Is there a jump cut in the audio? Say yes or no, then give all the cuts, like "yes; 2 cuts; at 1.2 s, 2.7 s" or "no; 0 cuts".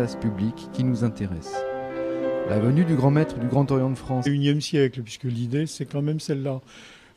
no; 0 cuts